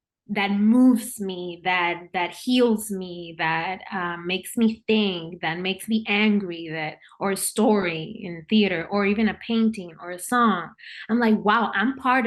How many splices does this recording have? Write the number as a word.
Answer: zero